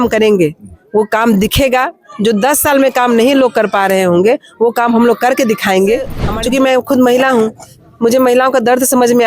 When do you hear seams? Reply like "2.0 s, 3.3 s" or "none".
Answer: 6.2 s